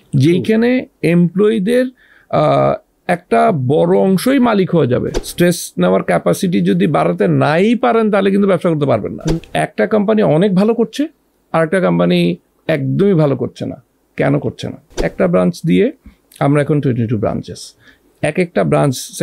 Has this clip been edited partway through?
yes; 3 cuts; at 5.2 s, 9.3 s, 15.0 s

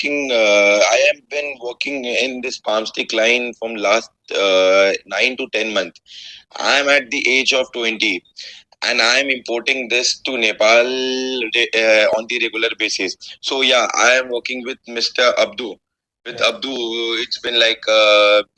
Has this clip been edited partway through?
no; 0 cuts

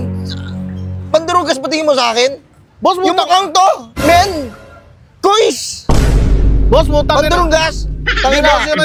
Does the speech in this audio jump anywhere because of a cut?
no; 0 cuts

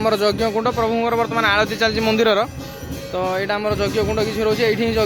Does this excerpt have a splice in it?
no; 0 cuts

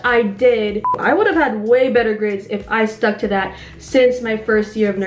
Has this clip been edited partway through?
yes; 1 cut; at 0.9 s

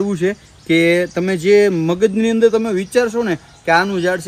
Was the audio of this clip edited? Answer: no; 0 cuts

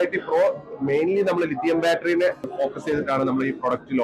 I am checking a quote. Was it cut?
yes; 1 cut; at 2.5 s

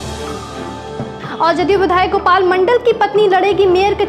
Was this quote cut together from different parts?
no; 0 cuts

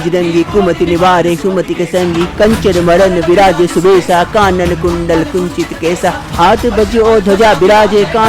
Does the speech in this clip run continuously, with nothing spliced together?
yes; 0 cuts

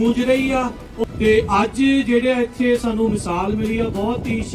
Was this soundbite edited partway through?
yes; 1 cut; at 0.9 s

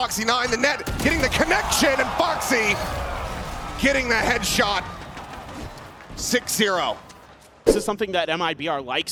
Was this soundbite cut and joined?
no; 0 cuts

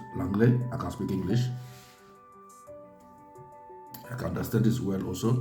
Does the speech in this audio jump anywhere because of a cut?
yes; 2 cuts; at 1.7 s, 4.1 s

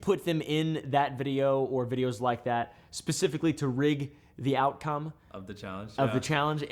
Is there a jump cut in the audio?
no; 0 cuts

